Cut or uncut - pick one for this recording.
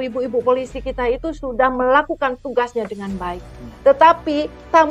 uncut